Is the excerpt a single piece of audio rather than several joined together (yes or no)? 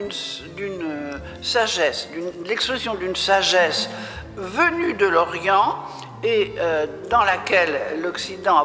yes